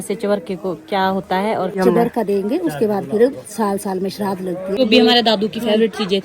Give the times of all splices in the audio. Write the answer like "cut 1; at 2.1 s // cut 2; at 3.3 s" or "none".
cut 1; at 1.8 s // cut 2; at 4.8 s